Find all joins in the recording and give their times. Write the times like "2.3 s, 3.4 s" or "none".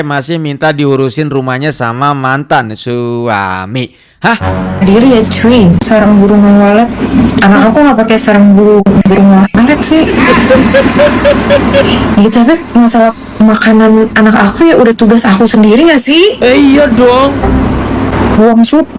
5.8 s, 18.1 s

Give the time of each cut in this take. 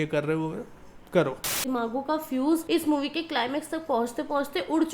1.6 s

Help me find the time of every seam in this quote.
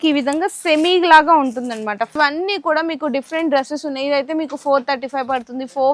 2.2 s

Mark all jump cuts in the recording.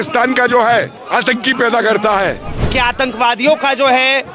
1.0 s, 2.6 s

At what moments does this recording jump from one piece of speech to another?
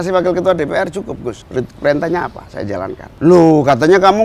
1.4 s, 3.0 s

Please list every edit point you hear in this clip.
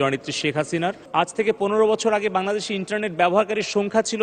1.0 s

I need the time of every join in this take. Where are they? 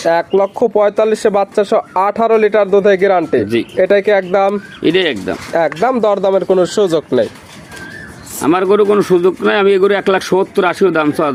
none

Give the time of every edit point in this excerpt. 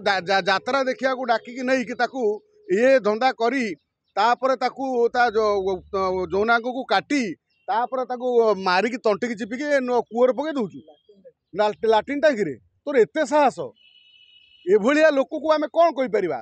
none

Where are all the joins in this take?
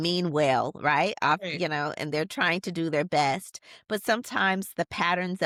none

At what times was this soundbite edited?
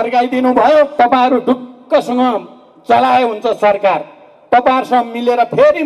0.9 s

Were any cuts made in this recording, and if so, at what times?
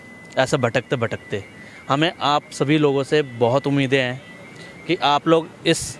none

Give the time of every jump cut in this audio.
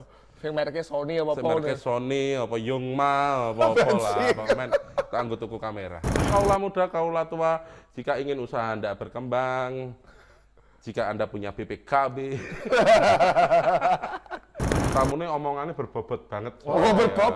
6.3 s, 14.8 s

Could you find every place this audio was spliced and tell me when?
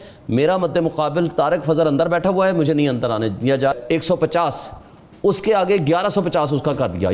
3.7 s

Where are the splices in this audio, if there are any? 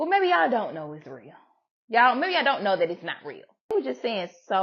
3.7 s

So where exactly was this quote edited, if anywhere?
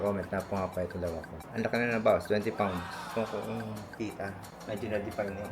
1.4 s, 4.5 s

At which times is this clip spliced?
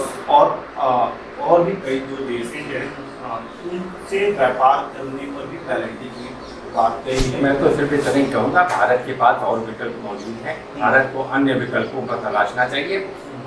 7.4 s

